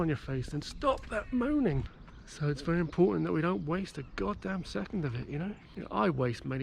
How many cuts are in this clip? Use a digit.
2